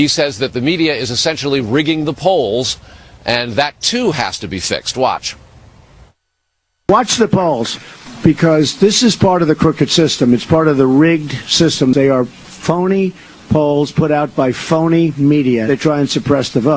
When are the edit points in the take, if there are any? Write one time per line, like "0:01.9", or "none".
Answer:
0:04.0